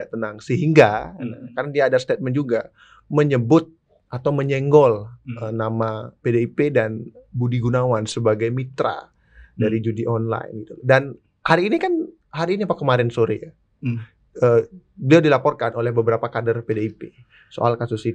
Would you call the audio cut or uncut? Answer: uncut